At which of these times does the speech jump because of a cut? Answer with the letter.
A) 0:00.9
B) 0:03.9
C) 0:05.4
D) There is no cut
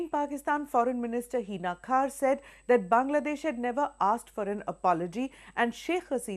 B